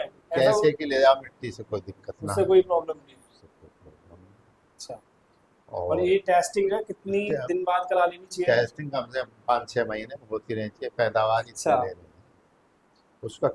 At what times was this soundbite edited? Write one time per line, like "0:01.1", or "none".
none